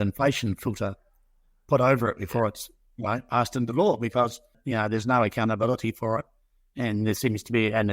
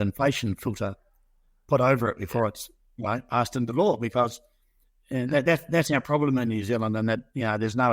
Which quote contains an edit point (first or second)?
first